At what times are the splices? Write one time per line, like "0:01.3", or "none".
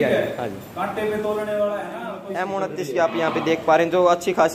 0:02.2